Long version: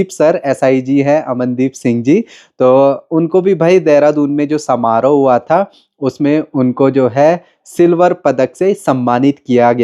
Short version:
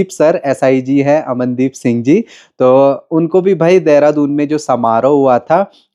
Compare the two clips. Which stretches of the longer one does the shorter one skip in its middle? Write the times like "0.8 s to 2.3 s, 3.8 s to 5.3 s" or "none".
none